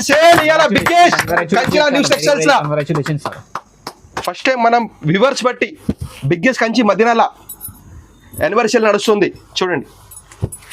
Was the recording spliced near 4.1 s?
yes; 1 cut; at 4.1 s

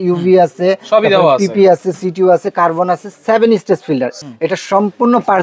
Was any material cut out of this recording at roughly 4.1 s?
yes; 1 cut; at 4.1 s

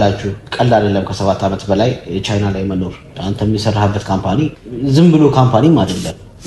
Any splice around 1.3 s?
no; 1 cut; at 4.5 s

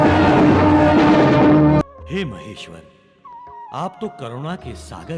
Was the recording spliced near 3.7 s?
no; 1 cut; at 1.8 s

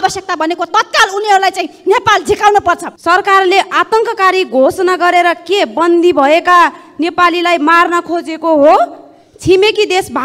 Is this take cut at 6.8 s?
no; 1 cut; at 2.9 s

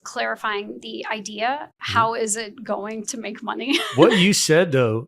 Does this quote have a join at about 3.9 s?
yes; 1 cut; at 3.9 s

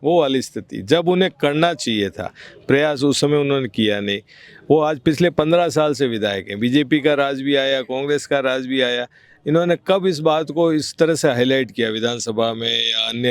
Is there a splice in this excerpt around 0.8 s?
no; 0 cuts

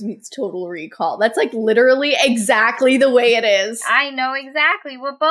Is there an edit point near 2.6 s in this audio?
no; 1 cut; at 3.8 s

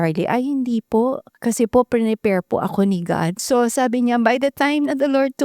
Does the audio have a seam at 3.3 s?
yes; 2 cuts; at 1.3 s, 3.3 s

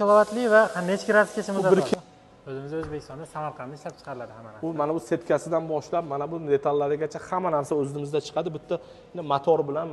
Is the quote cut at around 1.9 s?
yes; 1 cut; at 1.9 s

